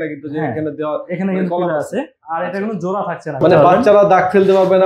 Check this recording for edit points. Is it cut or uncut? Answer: cut